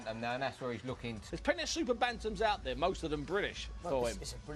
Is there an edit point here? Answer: no; 0 cuts

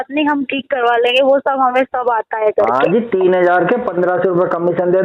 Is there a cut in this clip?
no; 0 cuts

